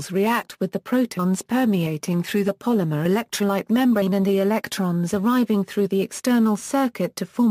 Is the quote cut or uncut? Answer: uncut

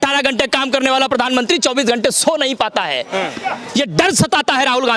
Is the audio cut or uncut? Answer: uncut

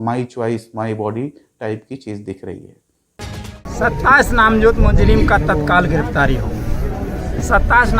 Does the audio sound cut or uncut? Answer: cut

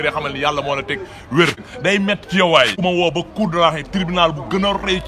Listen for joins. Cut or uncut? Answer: cut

